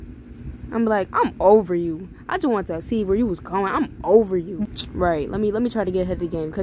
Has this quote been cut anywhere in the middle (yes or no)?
yes